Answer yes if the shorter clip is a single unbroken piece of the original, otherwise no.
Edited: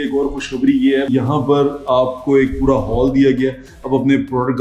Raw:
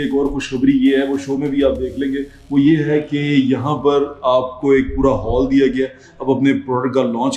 no